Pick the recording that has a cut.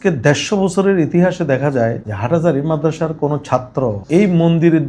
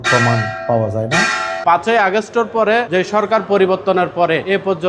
second; 1 cut; at 1.6 s

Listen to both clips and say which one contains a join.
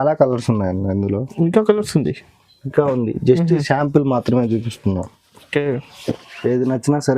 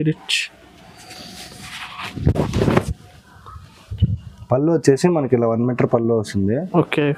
first; 1 cut; at 5.9 s

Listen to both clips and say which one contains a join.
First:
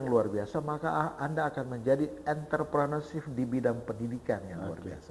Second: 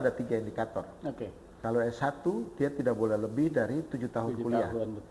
second; 1 cut; at 1.4 s

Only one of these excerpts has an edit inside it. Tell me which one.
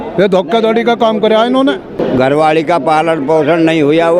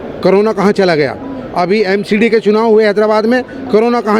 first; 1 cut; at 1.9 s

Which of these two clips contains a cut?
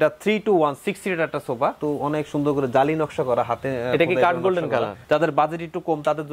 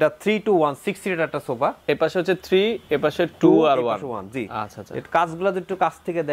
first; 2 cuts; at 1.8 s, 5.0 s

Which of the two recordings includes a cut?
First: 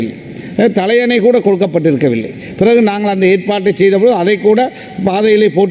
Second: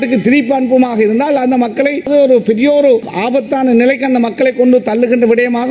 second; 2 cuts; at 2.1 s, 3.1 s

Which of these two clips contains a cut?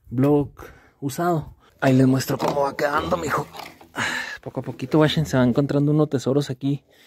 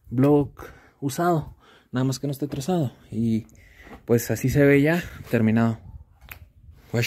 first; 1 cut; at 1.6 s

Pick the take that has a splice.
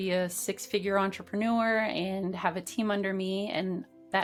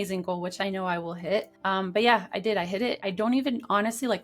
second; 2 cuts; at 1.5 s, 3.0 s

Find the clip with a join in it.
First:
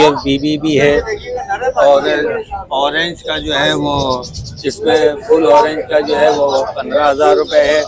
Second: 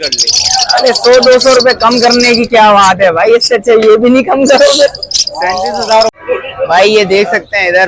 second; 1 cut; at 6.1 s

